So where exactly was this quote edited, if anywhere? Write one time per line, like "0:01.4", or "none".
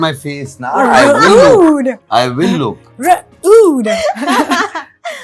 none